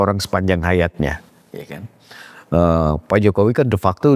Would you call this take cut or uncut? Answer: uncut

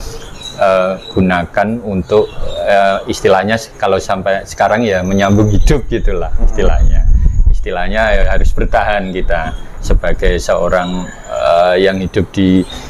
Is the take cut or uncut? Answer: uncut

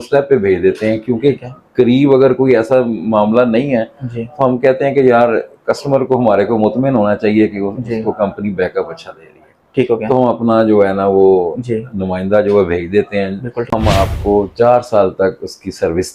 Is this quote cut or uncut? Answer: cut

